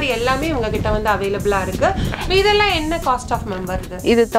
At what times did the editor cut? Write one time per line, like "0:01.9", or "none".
none